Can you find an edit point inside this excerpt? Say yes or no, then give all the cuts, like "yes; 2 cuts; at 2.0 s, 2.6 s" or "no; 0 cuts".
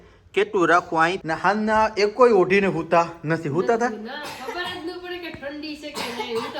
yes; 1 cut; at 1.2 s